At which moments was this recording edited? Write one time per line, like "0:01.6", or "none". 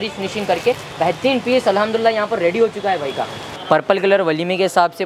0:03.5